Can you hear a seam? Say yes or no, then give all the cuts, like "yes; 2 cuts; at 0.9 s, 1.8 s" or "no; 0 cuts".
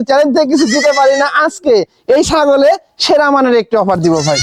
no; 0 cuts